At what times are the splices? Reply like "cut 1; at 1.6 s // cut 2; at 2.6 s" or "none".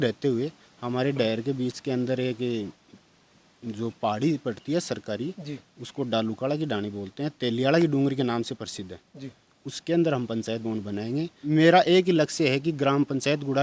cut 1; at 11.4 s